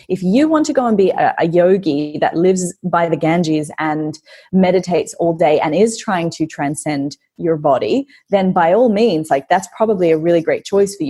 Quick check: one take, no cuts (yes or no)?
yes